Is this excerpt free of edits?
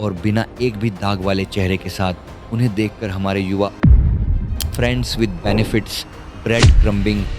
no; 1 cut; at 4.1 s

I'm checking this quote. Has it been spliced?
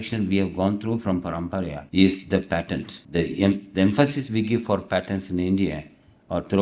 yes; 2 cuts; at 1.8 s, 2.9 s

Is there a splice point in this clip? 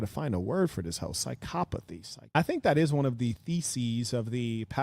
yes; 1 cut; at 2.4 s

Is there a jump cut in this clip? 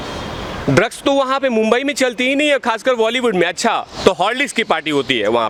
no; 0 cuts

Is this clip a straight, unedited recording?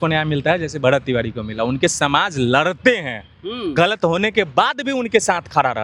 yes; 0 cuts

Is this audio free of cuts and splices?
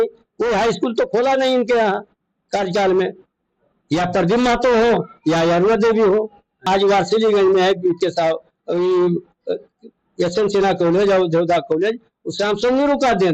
no; 1 cut; at 6.6 s

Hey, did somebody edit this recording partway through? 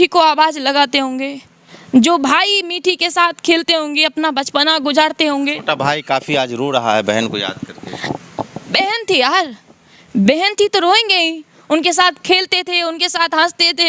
no; 0 cuts

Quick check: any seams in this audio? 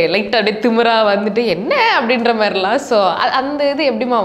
no; 0 cuts

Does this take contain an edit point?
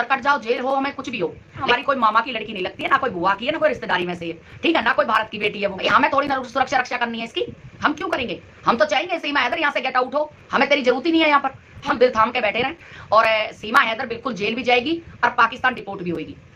yes; 3 cuts; at 1.7 s, 5.8 s, 11.8 s

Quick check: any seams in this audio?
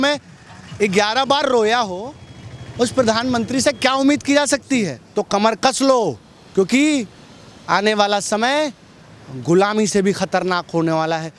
yes; 1 cut; at 5.0 s

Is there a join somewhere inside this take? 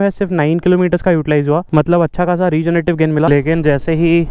yes; 1 cut; at 3.3 s

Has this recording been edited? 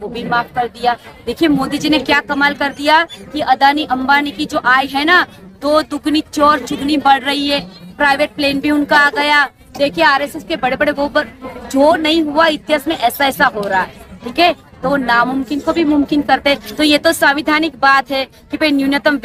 no; 0 cuts

